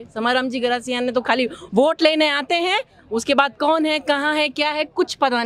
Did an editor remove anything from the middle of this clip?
no; 0 cuts

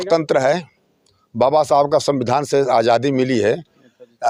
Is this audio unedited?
yes; 0 cuts

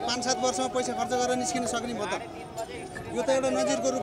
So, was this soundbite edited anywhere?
no; 0 cuts

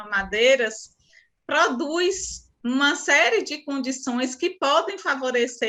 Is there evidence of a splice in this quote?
no; 0 cuts

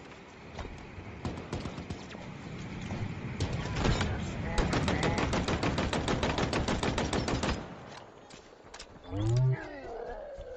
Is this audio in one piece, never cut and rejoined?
yes; 0 cuts

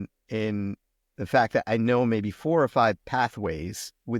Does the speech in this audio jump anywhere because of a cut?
no; 0 cuts

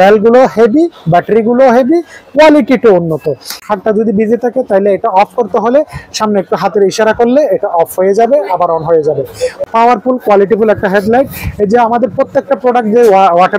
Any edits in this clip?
yes; 2 cuts; at 3.5 s, 9.7 s

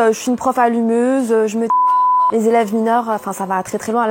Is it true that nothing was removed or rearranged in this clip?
yes; 0 cuts

